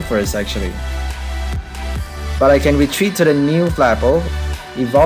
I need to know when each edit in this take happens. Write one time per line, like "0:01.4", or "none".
none